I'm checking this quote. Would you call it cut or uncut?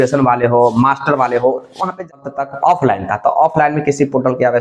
cut